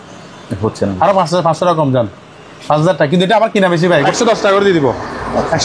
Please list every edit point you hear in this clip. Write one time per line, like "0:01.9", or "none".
0:04.0